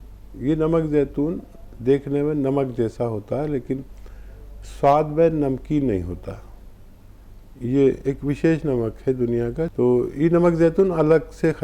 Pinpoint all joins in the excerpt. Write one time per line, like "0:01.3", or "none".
0:09.7